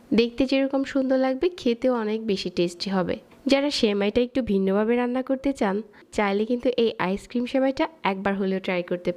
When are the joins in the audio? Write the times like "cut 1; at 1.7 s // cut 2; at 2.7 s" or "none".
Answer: cut 1; at 3.3 s // cut 2; at 6.0 s